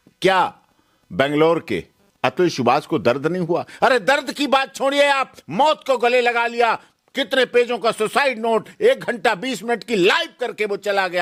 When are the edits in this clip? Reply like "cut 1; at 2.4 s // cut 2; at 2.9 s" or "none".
none